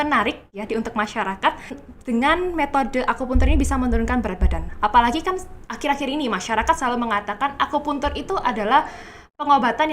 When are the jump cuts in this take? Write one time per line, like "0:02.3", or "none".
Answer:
0:01.9